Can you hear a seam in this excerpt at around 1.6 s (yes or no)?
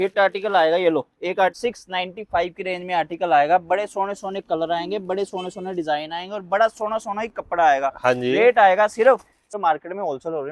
yes